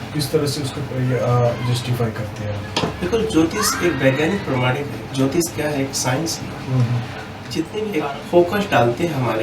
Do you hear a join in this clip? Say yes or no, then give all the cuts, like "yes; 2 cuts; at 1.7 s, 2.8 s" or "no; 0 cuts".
yes; 1 cut; at 7.9 s